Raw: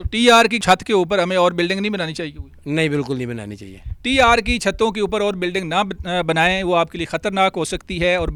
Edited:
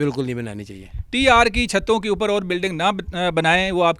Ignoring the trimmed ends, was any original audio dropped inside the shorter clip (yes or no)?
no